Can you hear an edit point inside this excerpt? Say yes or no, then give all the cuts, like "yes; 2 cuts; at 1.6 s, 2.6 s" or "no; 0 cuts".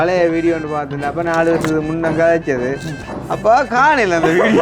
no; 0 cuts